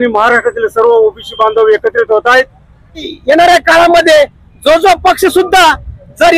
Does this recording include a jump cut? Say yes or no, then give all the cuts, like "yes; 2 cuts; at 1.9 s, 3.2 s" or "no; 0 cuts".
yes; 1 cut; at 3.1 s